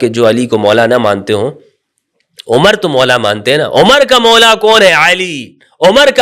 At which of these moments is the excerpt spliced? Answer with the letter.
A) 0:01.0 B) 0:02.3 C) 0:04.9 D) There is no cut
D